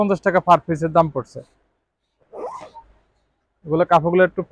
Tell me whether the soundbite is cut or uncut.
uncut